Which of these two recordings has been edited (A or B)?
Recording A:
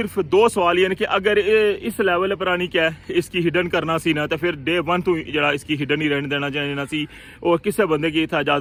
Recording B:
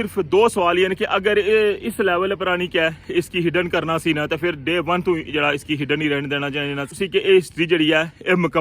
B